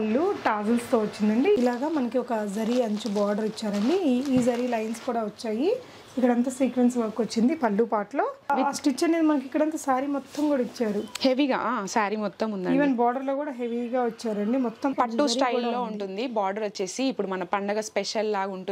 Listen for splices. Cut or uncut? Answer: cut